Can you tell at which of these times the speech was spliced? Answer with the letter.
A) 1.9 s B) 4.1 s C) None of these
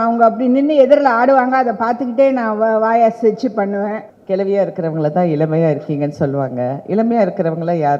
B